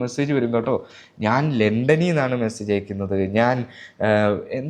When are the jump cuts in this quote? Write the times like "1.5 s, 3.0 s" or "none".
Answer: none